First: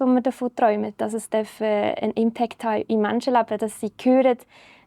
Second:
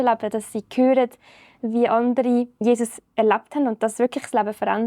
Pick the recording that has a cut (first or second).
second